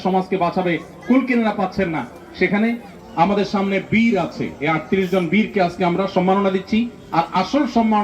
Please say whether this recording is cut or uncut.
cut